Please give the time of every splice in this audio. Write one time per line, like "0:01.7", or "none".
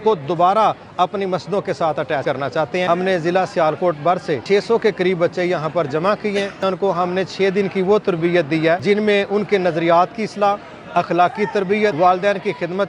0:02.3
0:04.4
0:06.6
0:08.8
0:11.9

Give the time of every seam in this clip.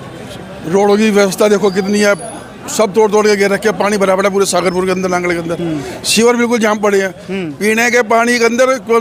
none

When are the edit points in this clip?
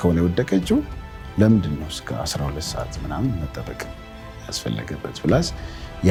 none

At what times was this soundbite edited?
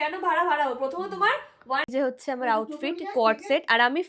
0:01.9

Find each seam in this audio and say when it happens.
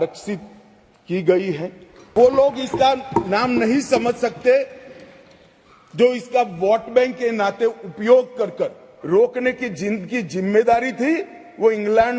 0:02.1
0:08.9

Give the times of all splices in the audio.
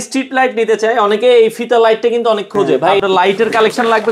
0:02.9

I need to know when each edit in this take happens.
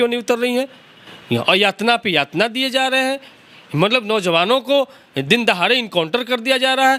none

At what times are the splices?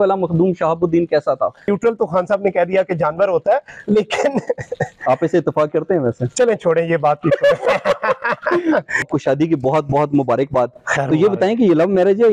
0:01.7
0:09.0

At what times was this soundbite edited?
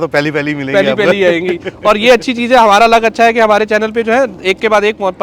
none

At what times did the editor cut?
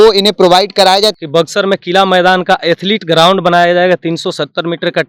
0:01.1

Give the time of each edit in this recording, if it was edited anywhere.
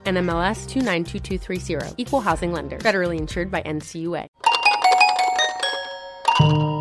0:04.3

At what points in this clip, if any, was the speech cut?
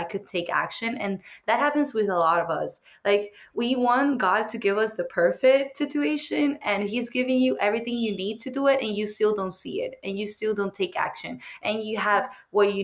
none

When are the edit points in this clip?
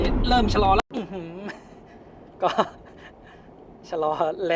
none

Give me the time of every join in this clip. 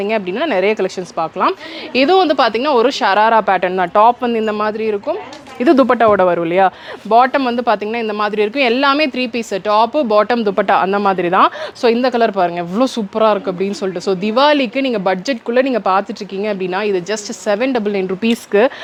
none

